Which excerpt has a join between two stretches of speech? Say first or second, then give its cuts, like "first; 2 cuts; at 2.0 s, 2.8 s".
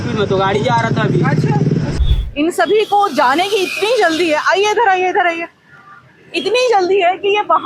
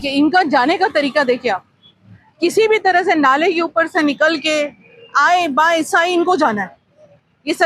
first; 1 cut; at 1.9 s